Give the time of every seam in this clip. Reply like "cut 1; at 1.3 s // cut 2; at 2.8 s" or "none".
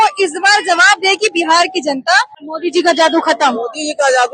cut 1; at 2.4 s